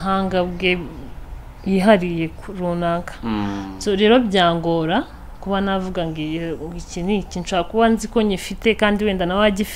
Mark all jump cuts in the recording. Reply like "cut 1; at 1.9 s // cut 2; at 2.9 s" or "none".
none